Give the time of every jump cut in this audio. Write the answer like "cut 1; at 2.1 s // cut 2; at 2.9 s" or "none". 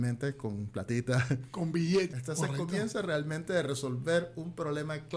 cut 1; at 2.1 s